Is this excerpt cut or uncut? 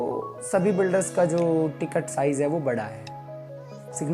uncut